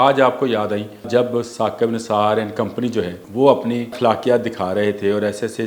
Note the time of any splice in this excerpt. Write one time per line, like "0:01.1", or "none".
0:01.1
0:03.2
0:03.9